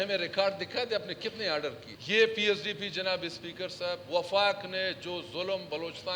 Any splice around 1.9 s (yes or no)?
yes